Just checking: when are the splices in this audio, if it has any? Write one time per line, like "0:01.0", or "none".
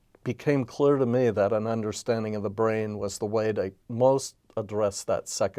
0:03.8